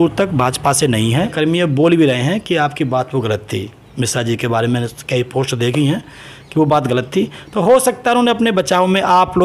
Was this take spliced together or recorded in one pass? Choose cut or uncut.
cut